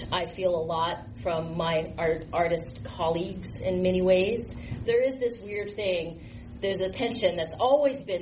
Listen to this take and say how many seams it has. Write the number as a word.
one